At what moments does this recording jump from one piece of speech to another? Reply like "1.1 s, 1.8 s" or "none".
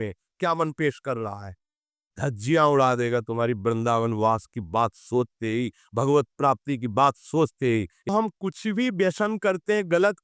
8.1 s